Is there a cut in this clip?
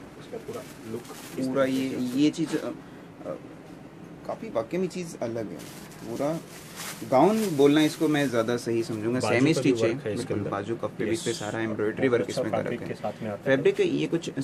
no; 0 cuts

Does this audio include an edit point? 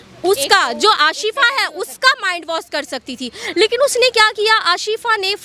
no; 0 cuts

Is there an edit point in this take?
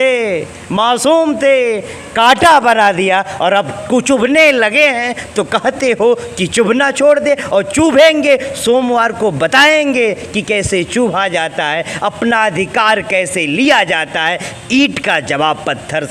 no; 0 cuts

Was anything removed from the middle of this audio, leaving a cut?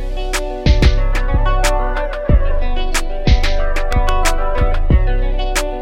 no; 0 cuts

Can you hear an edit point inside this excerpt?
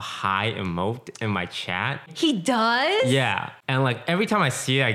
yes; 2 cuts; at 2.1 s, 3.5 s

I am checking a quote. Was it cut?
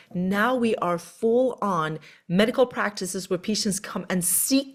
no; 0 cuts

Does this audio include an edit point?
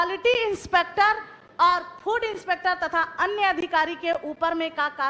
no; 0 cuts

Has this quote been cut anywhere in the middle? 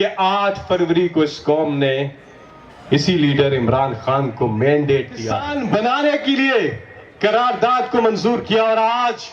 yes; 1 cut; at 5.5 s

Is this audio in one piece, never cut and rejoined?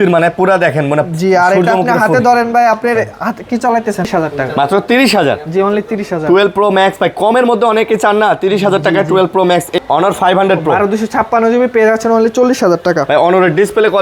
no; 2 cuts; at 4.1 s, 9.7 s

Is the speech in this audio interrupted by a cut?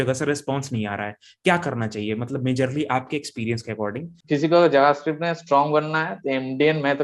yes; 1 cut; at 4.1 s

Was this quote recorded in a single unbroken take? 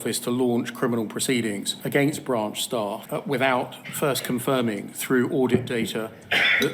yes; 0 cuts

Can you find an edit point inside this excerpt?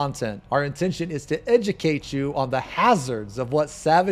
no; 0 cuts

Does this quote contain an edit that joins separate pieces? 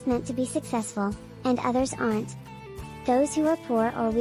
no; 0 cuts

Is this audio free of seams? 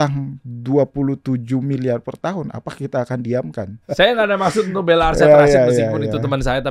no; 1 cut; at 3.8 s

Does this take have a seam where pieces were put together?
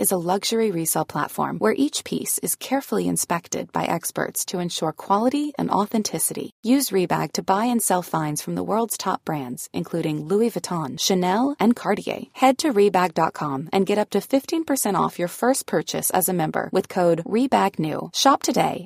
no; 0 cuts

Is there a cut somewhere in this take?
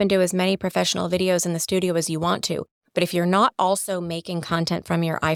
no; 0 cuts

